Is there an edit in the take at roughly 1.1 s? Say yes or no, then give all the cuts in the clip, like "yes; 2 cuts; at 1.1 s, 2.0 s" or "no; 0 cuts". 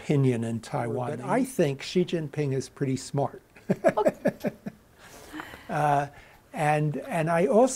yes; 1 cut; at 1.1 s